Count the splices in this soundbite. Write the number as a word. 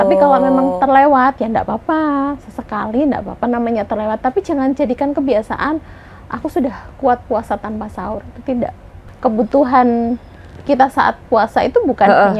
one